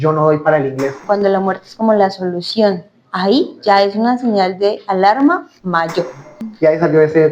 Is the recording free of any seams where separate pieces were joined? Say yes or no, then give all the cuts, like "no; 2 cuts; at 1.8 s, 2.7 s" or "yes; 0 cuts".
no; 2 cuts; at 1.0 s, 6.4 s